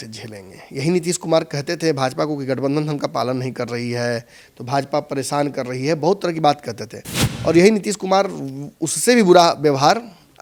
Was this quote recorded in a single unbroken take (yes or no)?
yes